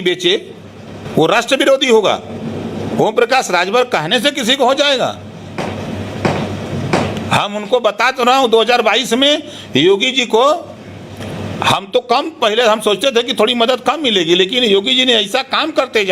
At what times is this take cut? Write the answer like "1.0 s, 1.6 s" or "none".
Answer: none